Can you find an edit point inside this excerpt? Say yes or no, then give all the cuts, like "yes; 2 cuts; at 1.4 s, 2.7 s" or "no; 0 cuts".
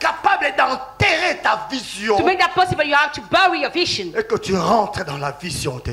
no; 0 cuts